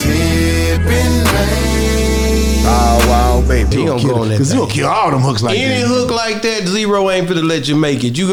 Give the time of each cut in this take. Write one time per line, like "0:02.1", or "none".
none